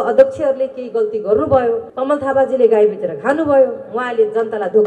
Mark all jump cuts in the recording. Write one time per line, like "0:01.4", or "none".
0:01.9